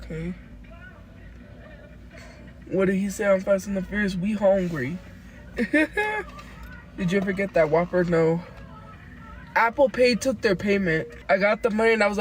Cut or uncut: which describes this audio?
cut